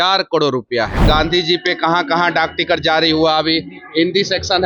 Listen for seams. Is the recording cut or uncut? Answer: cut